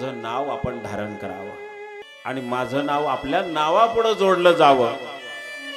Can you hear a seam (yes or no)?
yes